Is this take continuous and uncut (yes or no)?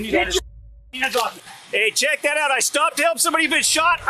no